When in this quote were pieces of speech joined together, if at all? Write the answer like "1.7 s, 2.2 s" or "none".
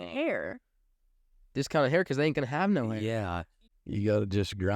3.5 s